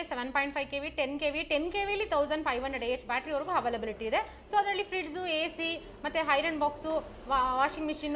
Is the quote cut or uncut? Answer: uncut